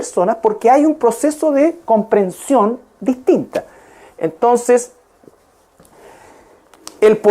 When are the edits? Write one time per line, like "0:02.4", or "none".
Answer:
0:01.3

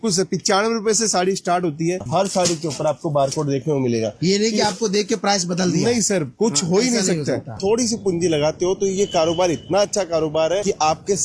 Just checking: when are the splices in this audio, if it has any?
0:02.0
0:07.5

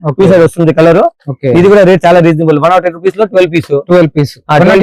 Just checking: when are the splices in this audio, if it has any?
none

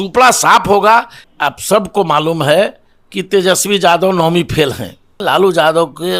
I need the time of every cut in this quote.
0:01.2
0:05.2

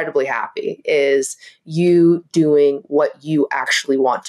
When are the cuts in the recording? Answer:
none

